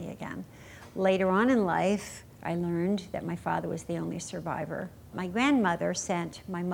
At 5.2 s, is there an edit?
yes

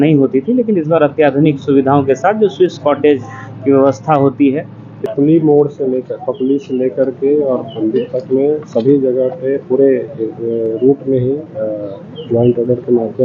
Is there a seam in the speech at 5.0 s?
yes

